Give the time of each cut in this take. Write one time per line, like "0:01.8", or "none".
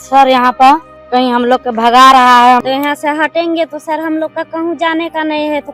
0:00.9
0:02.6